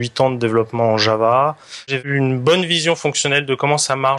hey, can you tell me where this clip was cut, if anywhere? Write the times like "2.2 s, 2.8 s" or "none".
2.0 s